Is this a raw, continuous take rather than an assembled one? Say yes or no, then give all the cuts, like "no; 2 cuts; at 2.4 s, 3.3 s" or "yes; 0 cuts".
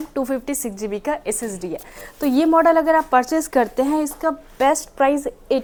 yes; 0 cuts